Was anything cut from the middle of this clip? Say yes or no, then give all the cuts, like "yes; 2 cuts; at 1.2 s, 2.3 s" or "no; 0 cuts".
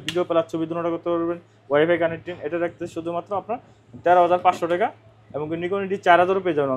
no; 0 cuts